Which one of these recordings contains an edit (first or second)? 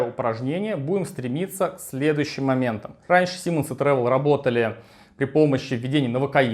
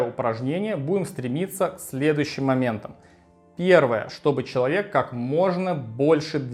first